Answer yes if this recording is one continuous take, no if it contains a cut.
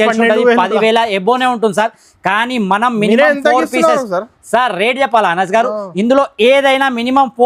yes